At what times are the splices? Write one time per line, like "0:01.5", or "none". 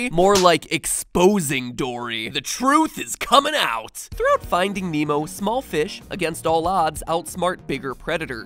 0:02.0